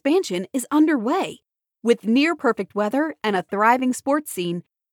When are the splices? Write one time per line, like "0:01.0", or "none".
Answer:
none